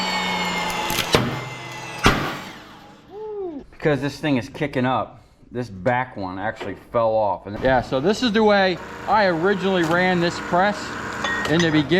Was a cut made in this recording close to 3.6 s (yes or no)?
yes